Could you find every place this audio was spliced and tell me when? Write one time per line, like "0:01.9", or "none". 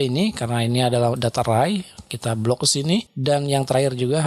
0:03.1